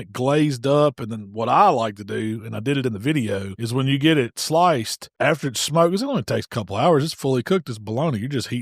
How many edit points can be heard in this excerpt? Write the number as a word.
two